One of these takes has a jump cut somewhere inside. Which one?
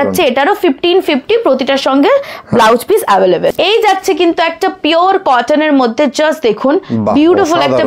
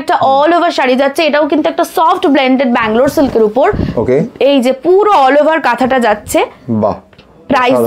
first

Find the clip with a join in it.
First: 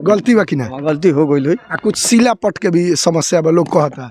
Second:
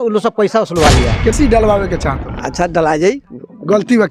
second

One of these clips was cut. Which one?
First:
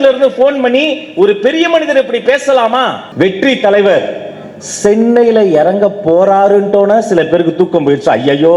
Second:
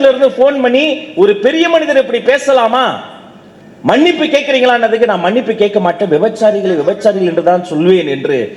first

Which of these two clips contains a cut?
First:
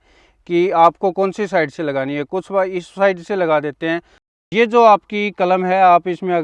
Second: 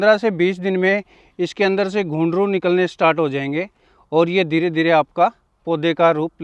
first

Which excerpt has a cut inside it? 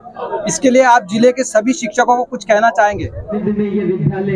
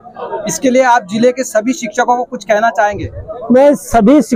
first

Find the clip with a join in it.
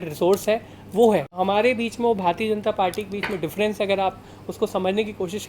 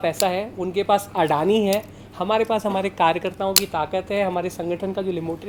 first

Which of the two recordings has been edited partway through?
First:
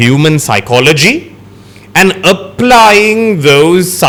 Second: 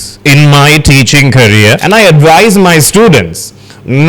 second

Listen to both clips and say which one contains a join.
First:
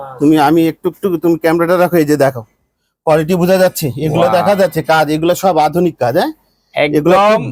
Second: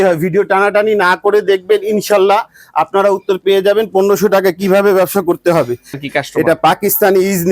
second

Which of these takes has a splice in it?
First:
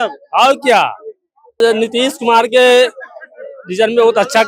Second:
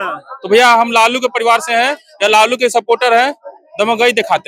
first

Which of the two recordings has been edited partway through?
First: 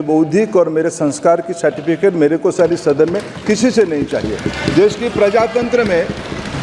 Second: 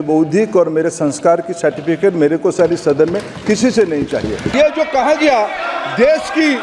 second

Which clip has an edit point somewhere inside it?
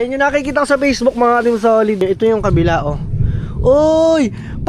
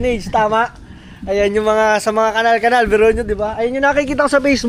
first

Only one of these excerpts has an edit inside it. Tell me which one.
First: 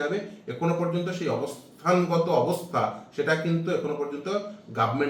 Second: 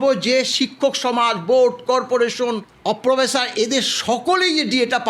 second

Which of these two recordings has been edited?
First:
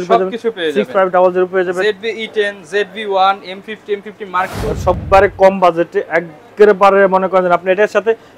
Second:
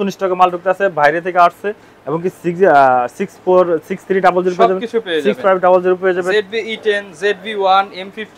first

